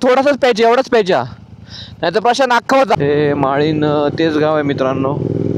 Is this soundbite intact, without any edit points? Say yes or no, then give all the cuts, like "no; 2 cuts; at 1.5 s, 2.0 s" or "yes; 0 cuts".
no; 1 cut; at 3.0 s